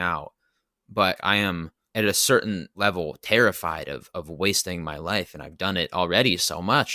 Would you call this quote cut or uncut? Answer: cut